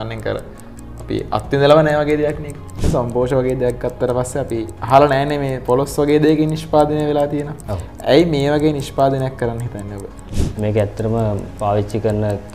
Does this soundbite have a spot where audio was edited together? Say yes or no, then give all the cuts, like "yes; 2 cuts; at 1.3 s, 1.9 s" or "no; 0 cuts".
yes; 2 cuts; at 2.9 s, 10.4 s